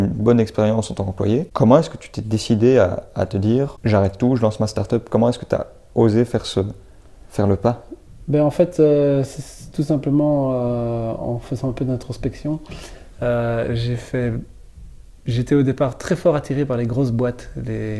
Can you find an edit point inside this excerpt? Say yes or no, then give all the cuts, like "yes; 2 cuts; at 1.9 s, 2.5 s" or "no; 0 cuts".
yes; 2 cuts; at 1.5 s, 3.8 s